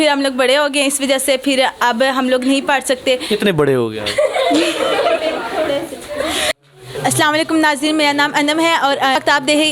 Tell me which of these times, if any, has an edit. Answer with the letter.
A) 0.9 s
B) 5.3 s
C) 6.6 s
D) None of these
C